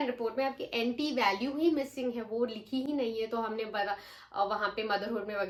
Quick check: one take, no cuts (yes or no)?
yes